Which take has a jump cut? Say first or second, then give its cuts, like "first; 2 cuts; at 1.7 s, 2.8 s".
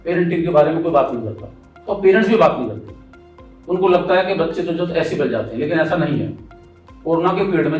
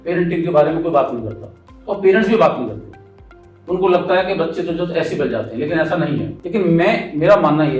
second; 1 cut; at 6.4 s